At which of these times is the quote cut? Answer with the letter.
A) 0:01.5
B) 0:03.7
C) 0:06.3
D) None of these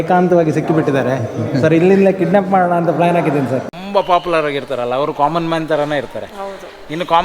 B